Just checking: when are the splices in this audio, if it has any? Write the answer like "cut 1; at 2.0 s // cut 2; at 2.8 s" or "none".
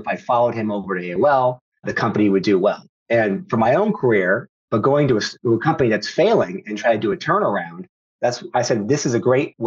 cut 1; at 1.9 s // cut 2; at 4.5 s

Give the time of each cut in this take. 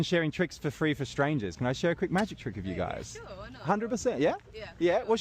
cut 1; at 4.2 s

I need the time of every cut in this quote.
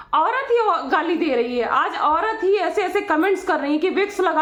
none

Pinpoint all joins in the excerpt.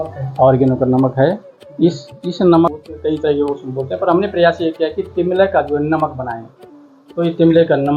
cut 1; at 2.8 s

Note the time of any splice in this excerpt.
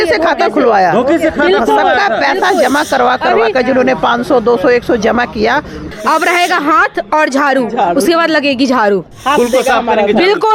cut 1; at 5.9 s // cut 2; at 9.1 s

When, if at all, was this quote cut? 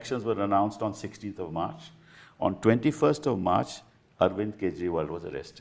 none

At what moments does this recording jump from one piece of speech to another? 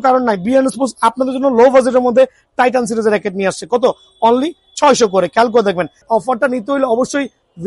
cut 1; at 6.0 s

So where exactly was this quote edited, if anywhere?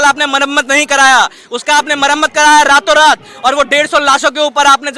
none

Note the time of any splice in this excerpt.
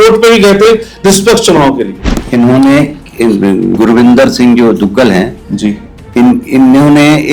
cut 1; at 2.0 s

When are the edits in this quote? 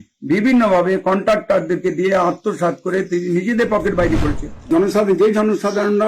cut 1; at 4.7 s

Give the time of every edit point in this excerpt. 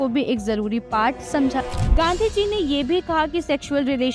cut 1; at 1.8 s

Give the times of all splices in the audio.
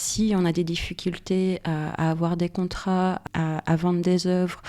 cut 1; at 3.2 s

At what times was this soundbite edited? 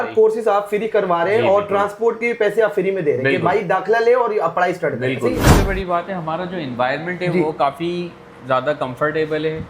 cut 1; at 5.5 s

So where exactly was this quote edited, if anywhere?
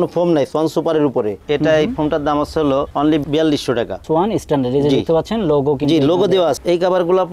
cut 1; at 1.4 s // cut 2; at 6.6 s

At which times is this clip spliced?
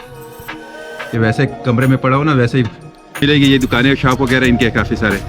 cut 1; at 3.2 s

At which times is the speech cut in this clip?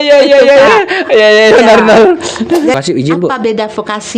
cut 1; at 2.7 s

